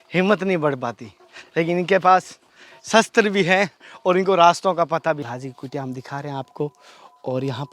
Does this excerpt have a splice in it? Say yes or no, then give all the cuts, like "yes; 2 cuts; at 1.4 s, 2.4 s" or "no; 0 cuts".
yes; 1 cut; at 5.2 s